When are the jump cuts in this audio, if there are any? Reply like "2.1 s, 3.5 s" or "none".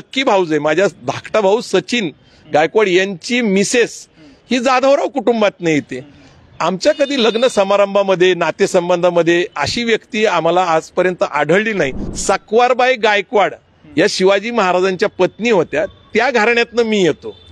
12.1 s

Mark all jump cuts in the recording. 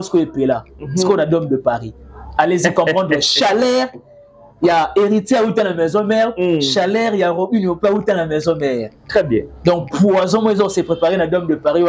none

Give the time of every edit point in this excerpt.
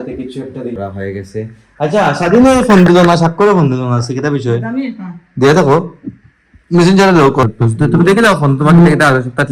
0.8 s, 7.4 s

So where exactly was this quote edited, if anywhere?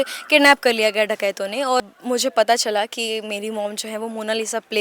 1.9 s

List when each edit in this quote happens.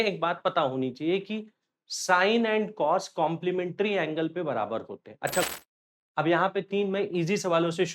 5.5 s

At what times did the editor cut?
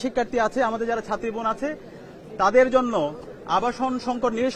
none

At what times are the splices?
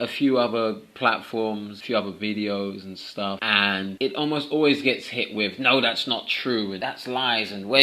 1.8 s, 6.8 s

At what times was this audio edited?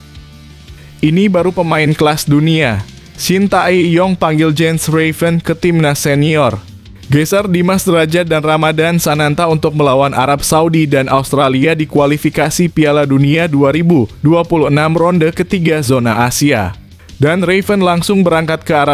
1.0 s

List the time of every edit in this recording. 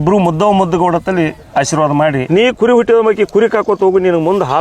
2.3 s

